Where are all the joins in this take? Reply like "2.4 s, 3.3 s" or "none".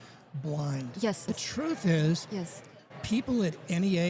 1.3 s